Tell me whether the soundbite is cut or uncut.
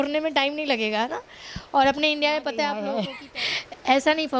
cut